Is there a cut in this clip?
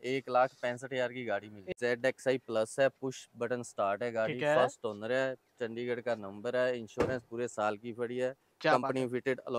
yes; 1 cut; at 1.7 s

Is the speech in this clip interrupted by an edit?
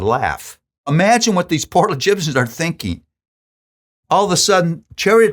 yes; 1 cut; at 0.9 s

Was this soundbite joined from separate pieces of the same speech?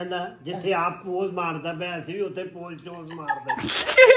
no; 0 cuts

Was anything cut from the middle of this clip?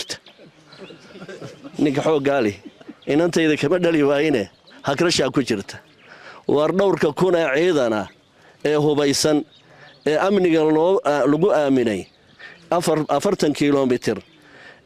no; 0 cuts

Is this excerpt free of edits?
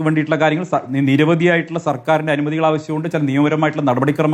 yes; 0 cuts

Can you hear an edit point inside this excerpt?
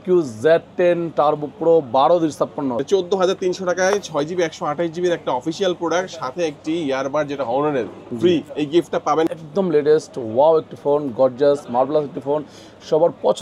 yes; 2 cuts; at 2.8 s, 9.3 s

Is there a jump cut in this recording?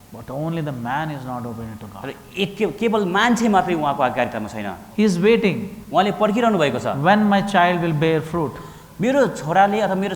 yes; 1 cut; at 4.8 s

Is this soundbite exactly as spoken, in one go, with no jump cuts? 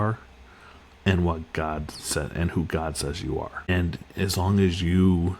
no; 1 cut; at 3.7 s

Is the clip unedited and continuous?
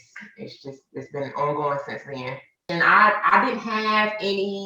no; 1 cut; at 2.6 s

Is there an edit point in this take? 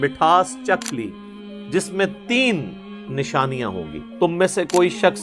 yes; 1 cut; at 4.0 s

